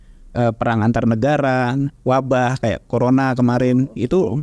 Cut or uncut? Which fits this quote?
uncut